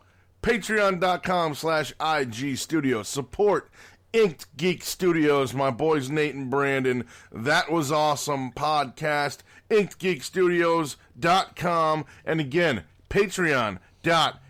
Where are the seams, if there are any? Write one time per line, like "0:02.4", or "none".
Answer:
none